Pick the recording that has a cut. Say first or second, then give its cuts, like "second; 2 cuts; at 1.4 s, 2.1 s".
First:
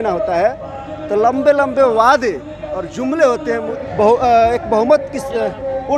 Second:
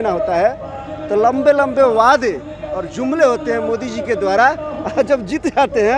first; 1 cut; at 3.8 s